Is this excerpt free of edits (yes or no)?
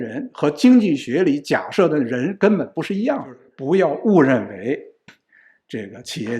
no